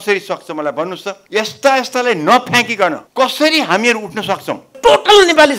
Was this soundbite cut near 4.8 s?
yes; 3 cuts; at 1.1 s, 3.0 s, 4.8 s

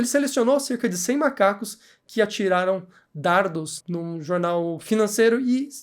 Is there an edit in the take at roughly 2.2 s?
no; 1 cut; at 3.8 s

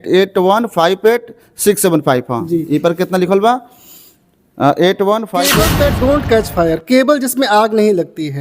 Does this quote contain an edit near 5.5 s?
yes; 1 cut; at 5.5 s

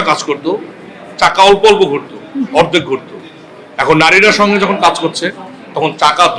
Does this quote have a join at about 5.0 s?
no; 0 cuts

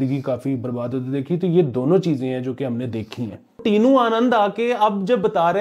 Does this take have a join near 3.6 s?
yes; 1 cut; at 3.6 s

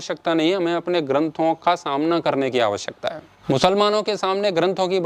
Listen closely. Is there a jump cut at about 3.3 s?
yes; 1 cut; at 3.3 s

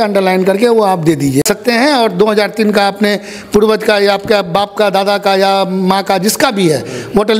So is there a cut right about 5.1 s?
no; 1 cut; at 1.4 s

